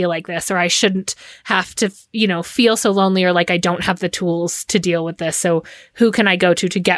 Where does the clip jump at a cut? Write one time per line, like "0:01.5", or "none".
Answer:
none